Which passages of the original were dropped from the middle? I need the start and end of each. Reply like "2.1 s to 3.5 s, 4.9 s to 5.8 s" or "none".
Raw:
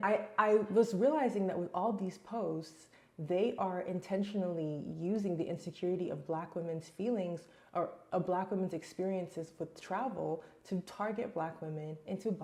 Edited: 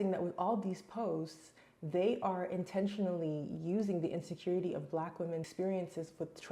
6.8 s to 8.9 s